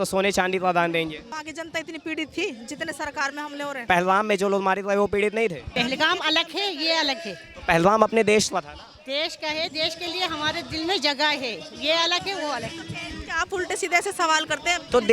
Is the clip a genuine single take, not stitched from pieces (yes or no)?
no